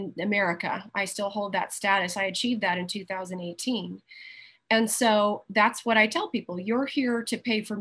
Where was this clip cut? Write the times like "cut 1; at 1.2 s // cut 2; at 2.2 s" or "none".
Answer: none